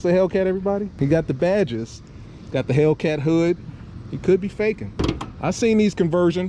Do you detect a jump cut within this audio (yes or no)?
yes